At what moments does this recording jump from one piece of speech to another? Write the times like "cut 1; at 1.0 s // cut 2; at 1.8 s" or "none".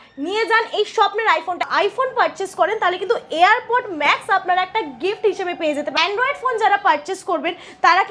cut 1; at 1.7 s // cut 2; at 5.9 s

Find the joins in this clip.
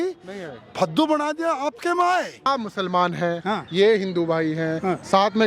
cut 1; at 2.5 s

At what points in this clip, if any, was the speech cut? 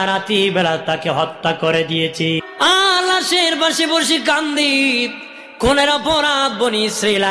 cut 1; at 2.4 s

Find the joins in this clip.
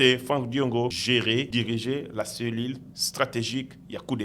cut 1; at 1.3 s

